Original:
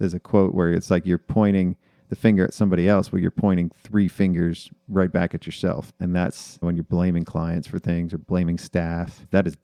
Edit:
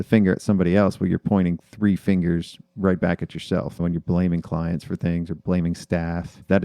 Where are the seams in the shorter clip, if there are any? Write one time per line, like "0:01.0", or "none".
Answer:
0:03.7